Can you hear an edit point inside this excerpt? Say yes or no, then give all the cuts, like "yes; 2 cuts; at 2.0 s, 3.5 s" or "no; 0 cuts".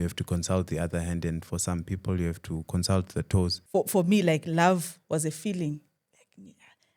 yes; 1 cut; at 3.6 s